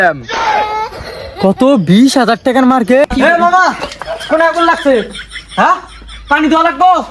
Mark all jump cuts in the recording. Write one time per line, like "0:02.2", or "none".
0:03.0

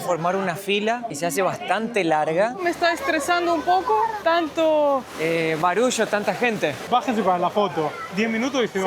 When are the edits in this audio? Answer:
0:01.1
0:02.6
0:04.2
0:05.1
0:06.8

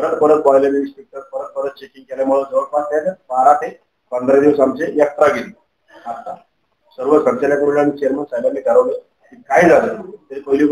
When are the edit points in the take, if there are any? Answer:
none

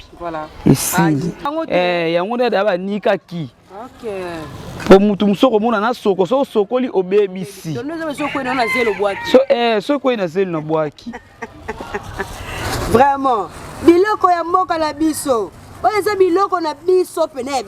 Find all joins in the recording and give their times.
0:01.5

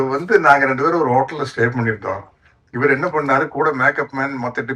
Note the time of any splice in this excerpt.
none

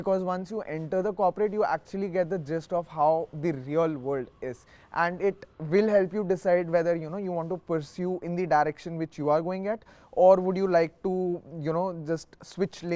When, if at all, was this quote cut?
none

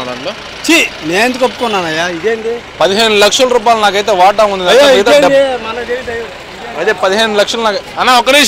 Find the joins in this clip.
none

